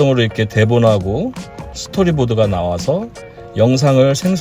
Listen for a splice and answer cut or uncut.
uncut